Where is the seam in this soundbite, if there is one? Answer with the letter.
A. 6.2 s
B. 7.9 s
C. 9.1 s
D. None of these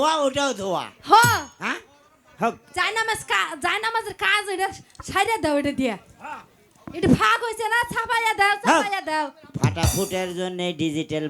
D